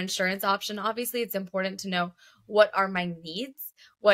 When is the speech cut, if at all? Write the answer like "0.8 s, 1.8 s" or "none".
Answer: none